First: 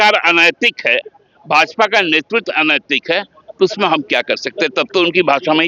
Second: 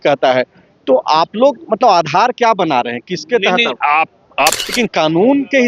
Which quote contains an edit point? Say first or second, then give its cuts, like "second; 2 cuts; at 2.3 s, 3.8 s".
second; 1 cut; at 4.6 s